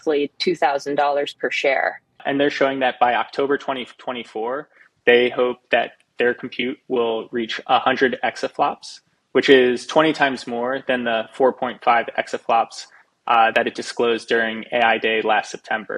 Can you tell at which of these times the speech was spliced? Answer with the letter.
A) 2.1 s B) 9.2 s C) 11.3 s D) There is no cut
A